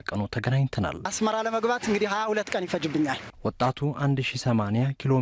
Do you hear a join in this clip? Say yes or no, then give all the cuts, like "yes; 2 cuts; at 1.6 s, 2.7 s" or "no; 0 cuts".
yes; 1 cut; at 1.1 s